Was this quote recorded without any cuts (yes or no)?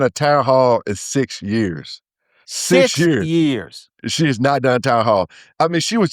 yes